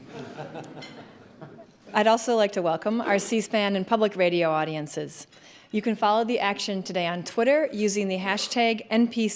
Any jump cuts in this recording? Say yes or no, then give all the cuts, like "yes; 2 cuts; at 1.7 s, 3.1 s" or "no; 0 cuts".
no; 0 cuts